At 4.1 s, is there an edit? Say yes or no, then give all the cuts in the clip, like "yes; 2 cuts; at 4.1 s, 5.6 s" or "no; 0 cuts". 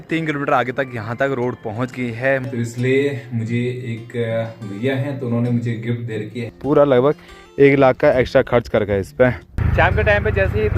no; 3 cuts; at 2.5 s, 6.5 s, 9.5 s